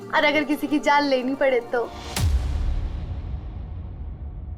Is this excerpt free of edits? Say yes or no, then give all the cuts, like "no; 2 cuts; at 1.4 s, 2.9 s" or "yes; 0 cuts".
yes; 0 cuts